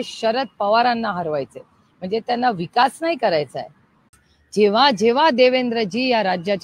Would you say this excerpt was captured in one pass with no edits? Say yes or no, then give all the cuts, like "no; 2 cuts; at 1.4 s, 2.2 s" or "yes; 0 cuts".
no; 1 cut; at 4.2 s